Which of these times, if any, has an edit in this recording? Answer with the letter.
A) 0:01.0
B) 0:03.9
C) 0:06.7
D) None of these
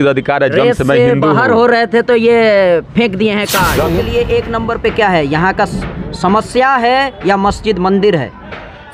B